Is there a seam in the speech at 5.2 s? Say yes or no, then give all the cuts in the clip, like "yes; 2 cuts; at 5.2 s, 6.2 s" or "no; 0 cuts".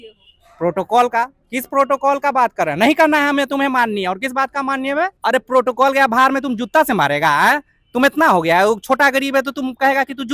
yes; 1 cut; at 5.2 s